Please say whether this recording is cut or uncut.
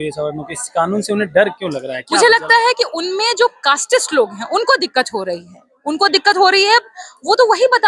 uncut